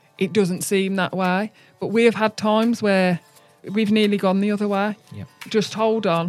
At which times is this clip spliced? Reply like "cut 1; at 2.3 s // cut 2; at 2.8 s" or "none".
cut 1; at 3.6 s // cut 2; at 5.5 s